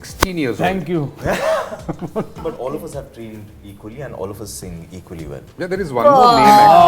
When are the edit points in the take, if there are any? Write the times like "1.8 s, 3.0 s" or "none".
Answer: 2.4 s